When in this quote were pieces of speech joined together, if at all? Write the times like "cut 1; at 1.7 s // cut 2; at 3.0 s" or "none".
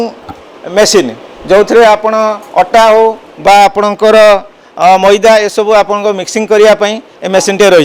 none

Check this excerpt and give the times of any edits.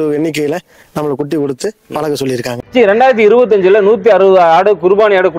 cut 1; at 2.6 s

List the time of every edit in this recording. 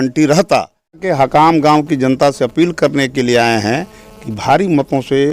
cut 1; at 1.0 s

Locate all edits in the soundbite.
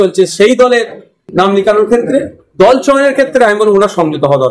none

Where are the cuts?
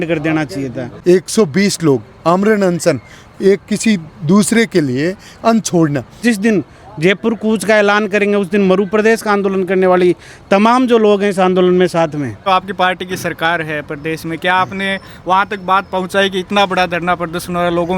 cut 1; at 0.9 s // cut 2; at 6.2 s // cut 3; at 12.5 s

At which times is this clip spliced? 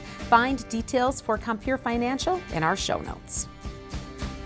cut 1; at 3.2 s

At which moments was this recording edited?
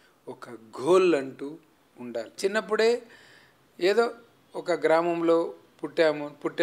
cut 1; at 2.3 s

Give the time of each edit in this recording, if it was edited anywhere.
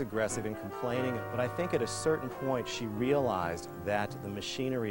cut 1; at 1.2 s

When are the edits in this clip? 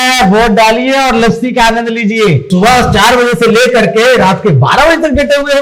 cut 1; at 2.5 s

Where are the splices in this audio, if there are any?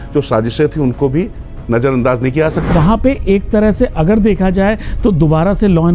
cut 1; at 2.7 s

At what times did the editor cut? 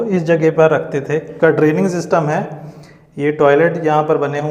cut 1; at 1.2 s

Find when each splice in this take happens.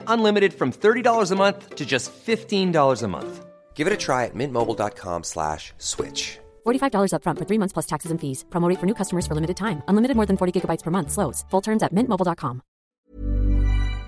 cut 1; at 12.9 s

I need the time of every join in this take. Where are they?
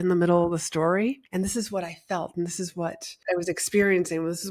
cut 1; at 1.2 s // cut 2; at 3.1 s

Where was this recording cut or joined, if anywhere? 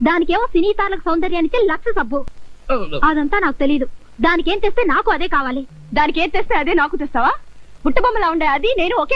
cut 1; at 2.3 s // cut 2; at 5.8 s

